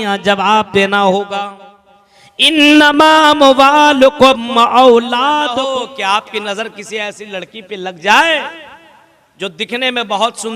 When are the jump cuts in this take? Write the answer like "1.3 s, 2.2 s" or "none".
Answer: 5.5 s